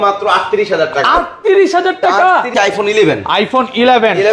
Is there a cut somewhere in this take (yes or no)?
yes